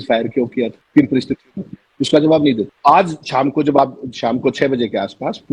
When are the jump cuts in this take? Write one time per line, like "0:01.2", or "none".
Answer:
none